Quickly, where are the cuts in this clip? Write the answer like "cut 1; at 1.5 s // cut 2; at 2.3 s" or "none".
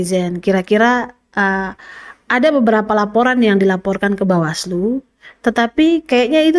none